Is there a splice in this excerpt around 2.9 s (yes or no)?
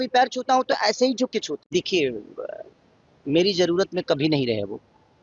no